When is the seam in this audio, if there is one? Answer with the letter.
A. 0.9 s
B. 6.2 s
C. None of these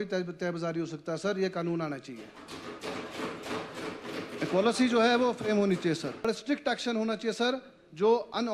B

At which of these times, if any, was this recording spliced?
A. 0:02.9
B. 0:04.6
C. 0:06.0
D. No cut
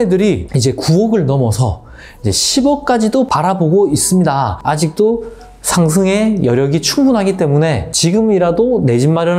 B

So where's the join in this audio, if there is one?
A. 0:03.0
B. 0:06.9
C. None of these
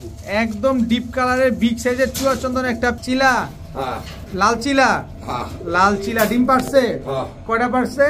A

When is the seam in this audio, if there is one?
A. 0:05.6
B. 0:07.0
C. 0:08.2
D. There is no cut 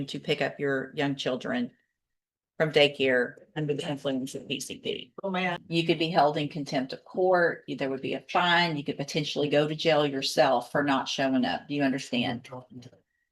A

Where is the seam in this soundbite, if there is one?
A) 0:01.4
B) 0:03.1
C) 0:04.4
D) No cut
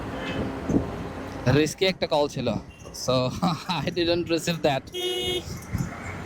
D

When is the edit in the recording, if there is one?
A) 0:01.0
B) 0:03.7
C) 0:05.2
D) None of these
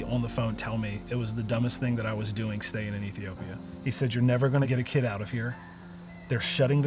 B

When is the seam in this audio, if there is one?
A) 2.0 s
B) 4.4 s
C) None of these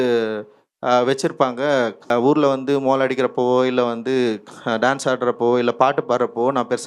A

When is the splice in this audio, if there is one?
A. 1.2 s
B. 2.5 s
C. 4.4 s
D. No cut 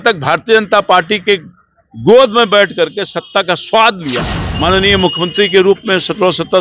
C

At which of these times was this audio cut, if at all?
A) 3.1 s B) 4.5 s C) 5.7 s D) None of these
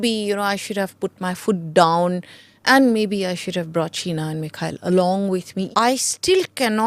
C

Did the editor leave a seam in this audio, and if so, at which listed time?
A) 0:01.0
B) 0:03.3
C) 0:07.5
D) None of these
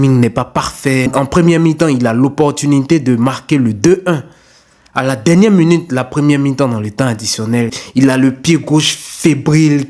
A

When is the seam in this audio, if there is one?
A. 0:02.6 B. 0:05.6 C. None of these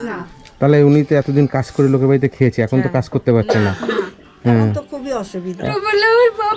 B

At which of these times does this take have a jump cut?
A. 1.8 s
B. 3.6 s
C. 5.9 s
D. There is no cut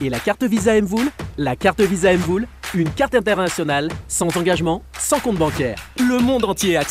D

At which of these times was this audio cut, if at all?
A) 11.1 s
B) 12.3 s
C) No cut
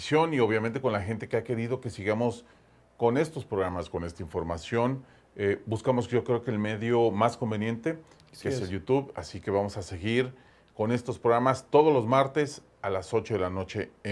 C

